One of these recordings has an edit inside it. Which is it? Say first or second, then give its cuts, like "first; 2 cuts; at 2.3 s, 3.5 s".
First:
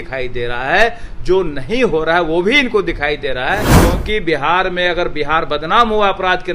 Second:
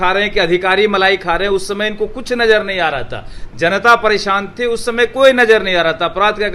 first; 1 cut; at 3.7 s